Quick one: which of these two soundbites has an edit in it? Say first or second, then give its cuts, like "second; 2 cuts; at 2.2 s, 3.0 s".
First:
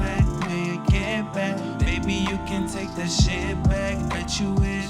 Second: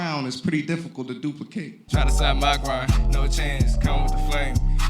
second; 1 cut; at 1.8 s